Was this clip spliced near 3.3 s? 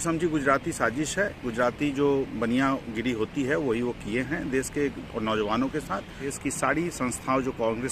no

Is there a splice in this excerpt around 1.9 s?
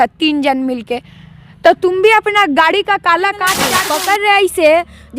no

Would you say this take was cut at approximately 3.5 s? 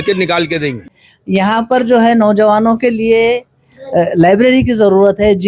no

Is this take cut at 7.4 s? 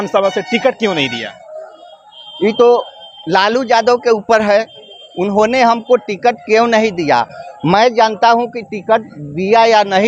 no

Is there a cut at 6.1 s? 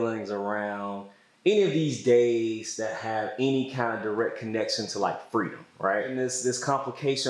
yes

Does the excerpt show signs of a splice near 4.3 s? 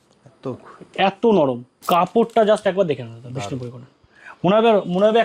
no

